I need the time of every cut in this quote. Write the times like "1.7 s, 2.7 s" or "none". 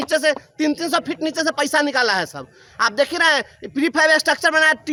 none